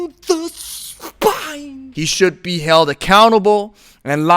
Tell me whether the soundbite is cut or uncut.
cut